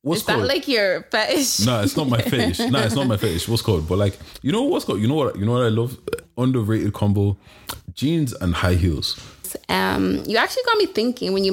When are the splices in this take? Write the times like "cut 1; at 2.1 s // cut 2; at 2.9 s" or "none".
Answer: cut 1; at 9.5 s

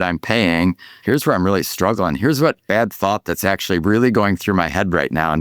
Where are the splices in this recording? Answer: cut 1; at 0.9 s // cut 2; at 2.6 s

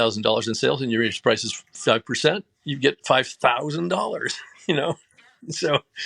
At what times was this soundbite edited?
none

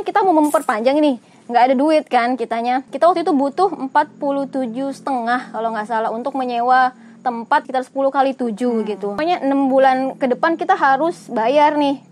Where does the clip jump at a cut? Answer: cut 1; at 2.9 s // cut 2; at 7.7 s // cut 3; at 9.2 s

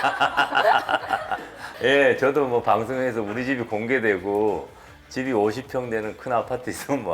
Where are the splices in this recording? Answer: cut 1; at 1.7 s

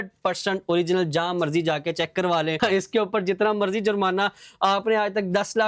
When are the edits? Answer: cut 1; at 2.6 s

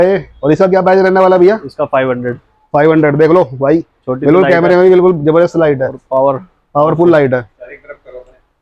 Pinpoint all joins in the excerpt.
none

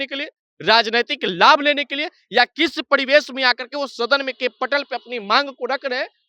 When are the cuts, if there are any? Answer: none

